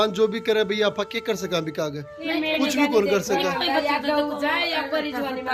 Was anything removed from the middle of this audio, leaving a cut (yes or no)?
no